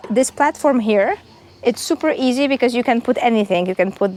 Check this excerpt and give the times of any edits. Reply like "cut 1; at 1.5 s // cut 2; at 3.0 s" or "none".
none